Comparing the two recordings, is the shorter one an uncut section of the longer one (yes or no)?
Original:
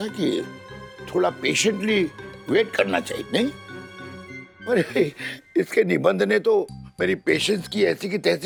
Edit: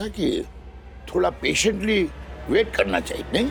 yes